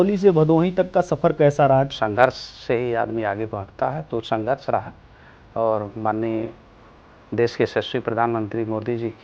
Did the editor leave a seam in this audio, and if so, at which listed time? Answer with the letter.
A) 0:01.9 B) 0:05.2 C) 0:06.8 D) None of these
A